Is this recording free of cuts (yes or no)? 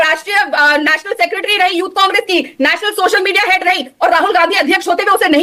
yes